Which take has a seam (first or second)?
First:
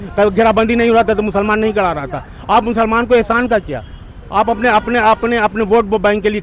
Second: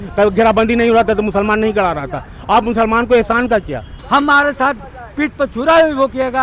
second